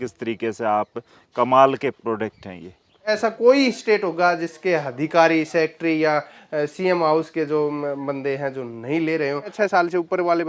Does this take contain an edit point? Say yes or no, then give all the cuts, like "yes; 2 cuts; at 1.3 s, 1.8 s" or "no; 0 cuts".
yes; 2 cuts; at 3.2 s, 9.5 s